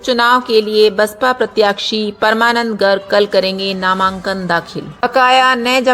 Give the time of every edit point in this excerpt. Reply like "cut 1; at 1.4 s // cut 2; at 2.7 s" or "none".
cut 1; at 4.9 s